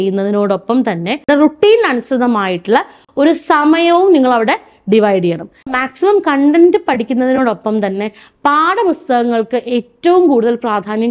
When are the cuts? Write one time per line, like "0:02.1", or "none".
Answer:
0:01.3
0:05.7